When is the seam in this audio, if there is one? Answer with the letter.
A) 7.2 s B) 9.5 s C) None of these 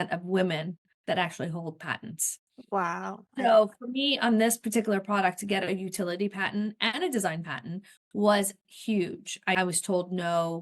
B